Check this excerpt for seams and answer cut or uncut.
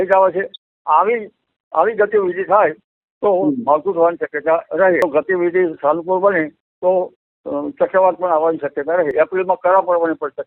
cut